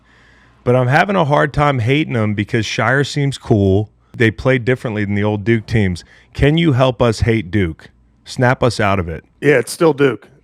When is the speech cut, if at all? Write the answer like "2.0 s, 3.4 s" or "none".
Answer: 4.1 s, 9.2 s